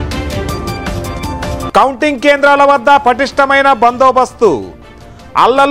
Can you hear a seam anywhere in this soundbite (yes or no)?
yes